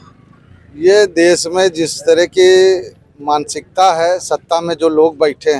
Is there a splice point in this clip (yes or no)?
no